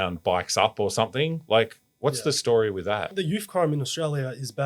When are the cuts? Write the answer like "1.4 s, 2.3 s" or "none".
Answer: 3.2 s